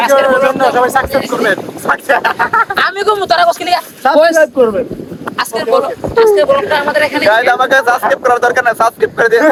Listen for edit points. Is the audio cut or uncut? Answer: uncut